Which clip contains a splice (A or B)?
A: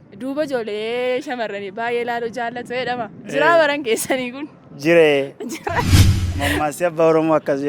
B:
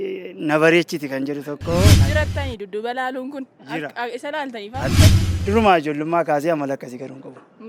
B